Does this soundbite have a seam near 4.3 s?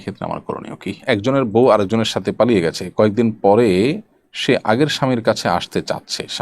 no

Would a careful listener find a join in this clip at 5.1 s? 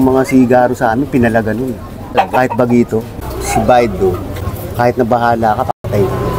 no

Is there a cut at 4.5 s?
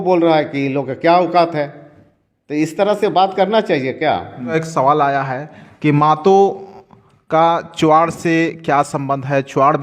yes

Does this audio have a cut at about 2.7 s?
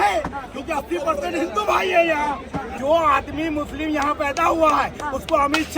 yes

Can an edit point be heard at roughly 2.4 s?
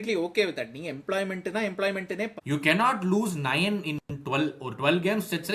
yes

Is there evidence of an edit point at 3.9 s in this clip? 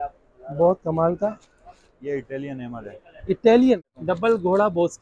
yes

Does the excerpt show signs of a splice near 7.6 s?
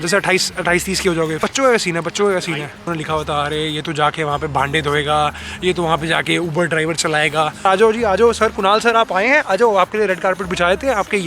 yes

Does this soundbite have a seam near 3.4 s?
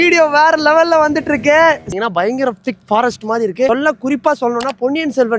no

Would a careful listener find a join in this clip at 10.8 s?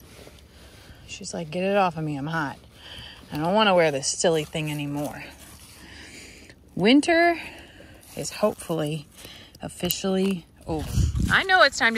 yes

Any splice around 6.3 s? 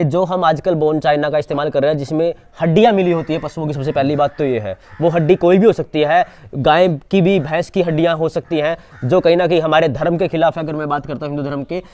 no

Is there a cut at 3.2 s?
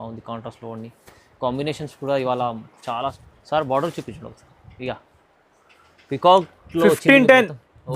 yes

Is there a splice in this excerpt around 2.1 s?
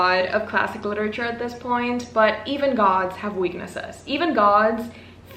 no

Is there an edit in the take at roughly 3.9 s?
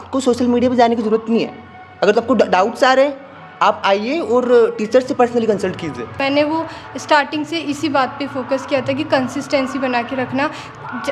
no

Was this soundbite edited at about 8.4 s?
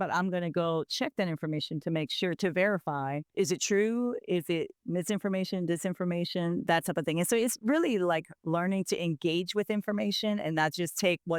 no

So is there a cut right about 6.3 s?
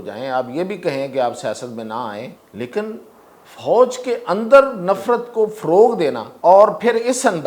yes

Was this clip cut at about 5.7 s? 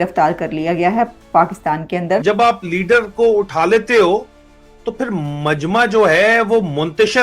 no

